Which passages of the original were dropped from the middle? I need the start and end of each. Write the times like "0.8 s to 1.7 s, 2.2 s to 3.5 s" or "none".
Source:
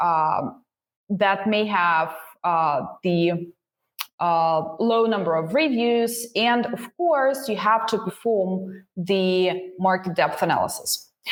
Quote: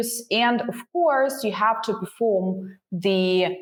none